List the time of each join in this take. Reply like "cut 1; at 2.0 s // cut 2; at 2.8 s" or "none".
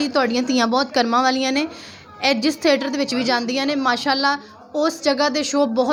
none

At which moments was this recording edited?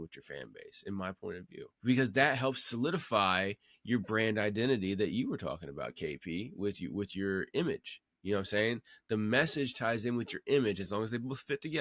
cut 1; at 1.9 s

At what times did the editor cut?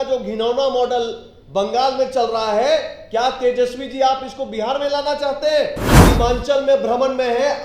cut 1; at 5.9 s

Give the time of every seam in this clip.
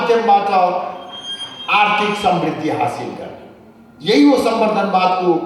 none

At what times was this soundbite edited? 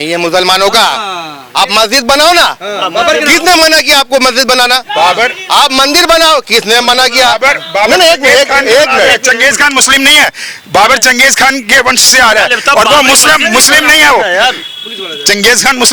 none

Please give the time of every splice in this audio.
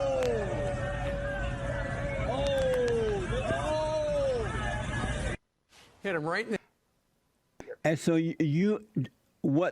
cut 1; at 7.6 s

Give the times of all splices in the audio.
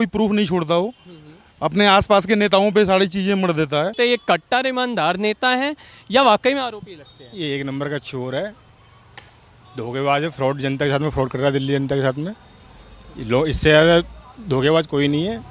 cut 1; at 3.9 s

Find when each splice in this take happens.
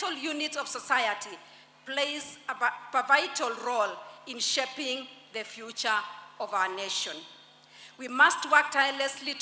none

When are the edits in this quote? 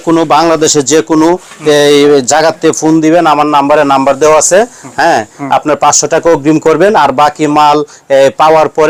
none

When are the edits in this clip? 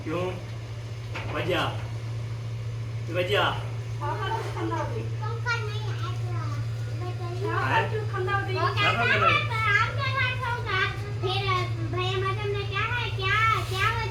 none

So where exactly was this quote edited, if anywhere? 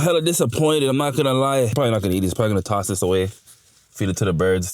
cut 1; at 1.7 s

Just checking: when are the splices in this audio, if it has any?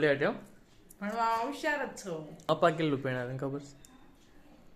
cut 1; at 2.5 s

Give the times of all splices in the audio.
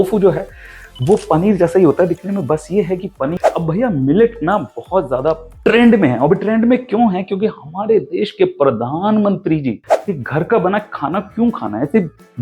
cut 1; at 3.2 s // cut 2; at 9.9 s

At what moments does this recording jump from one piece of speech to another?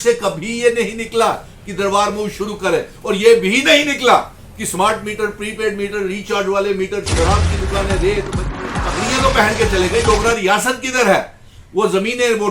cut 1; at 8.7 s

